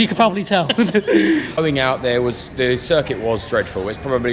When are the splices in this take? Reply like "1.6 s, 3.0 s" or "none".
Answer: 1.6 s